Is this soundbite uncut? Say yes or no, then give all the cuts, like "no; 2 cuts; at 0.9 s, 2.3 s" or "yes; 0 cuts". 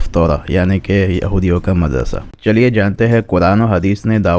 yes; 0 cuts